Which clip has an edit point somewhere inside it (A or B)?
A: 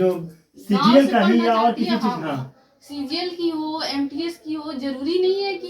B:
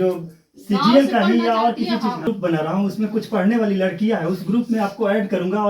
B